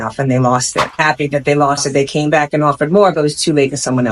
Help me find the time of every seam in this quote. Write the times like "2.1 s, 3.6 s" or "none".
1.0 s